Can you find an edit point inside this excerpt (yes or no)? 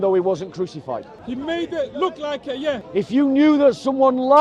yes